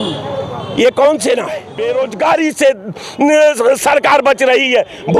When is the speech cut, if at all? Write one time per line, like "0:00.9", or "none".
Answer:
0:01.7

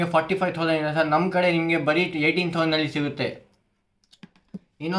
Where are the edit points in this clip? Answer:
none

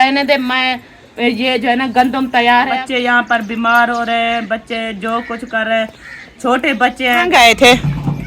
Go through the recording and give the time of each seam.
0:02.8
0:07.2

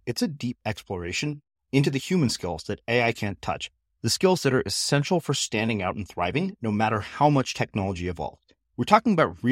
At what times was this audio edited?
none

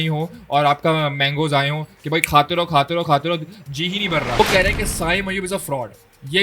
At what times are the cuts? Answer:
0:04.4

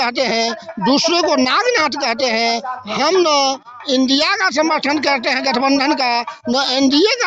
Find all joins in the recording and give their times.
none

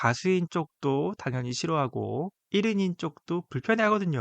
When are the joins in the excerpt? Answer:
0:02.4

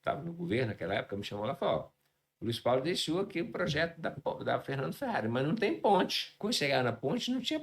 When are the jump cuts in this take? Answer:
0:06.2

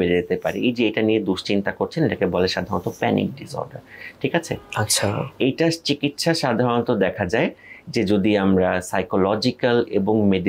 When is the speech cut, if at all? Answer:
none

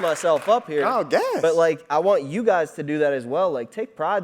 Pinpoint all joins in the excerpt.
none

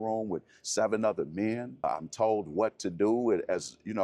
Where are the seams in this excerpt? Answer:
0:01.8

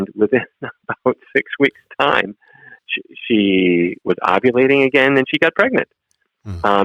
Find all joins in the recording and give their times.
0:02.8

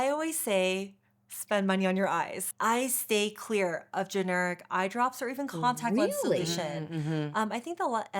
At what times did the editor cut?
0:02.4

